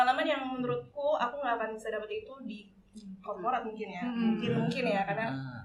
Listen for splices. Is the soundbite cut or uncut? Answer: uncut